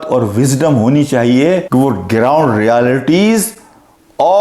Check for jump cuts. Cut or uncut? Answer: uncut